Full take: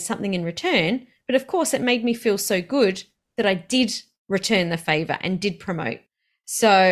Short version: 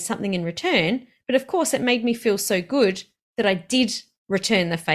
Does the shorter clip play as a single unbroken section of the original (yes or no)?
yes